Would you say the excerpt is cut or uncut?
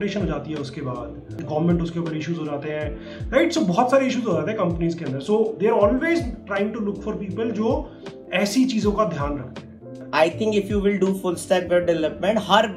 cut